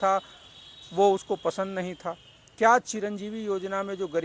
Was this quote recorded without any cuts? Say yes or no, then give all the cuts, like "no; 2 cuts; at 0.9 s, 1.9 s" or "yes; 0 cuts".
yes; 0 cuts